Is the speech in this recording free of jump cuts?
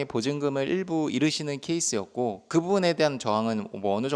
yes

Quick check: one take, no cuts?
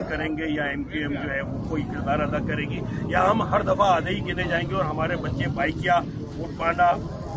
yes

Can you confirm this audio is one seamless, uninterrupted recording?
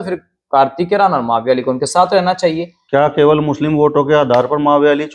no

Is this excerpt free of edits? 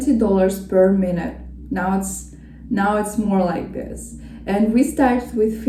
yes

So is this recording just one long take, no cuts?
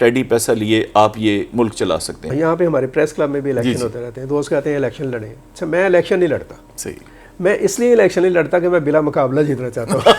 no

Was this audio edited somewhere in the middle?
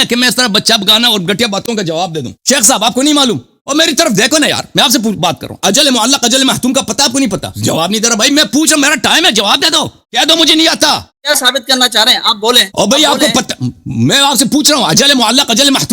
yes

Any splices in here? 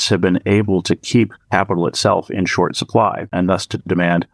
yes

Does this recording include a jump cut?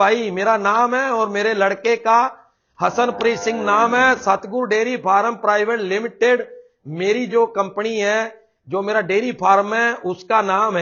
no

